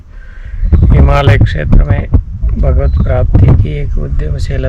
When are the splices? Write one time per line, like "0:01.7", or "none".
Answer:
none